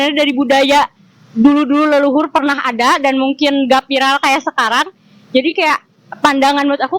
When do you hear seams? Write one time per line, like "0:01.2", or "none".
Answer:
none